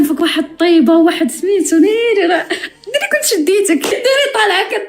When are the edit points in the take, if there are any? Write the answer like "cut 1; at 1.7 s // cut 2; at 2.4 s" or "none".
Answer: cut 1; at 3.9 s